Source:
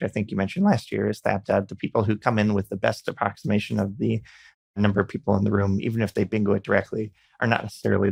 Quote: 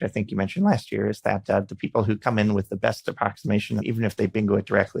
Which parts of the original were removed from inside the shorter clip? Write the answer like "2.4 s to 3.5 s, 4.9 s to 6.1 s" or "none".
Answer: 3.8 s to 5.8 s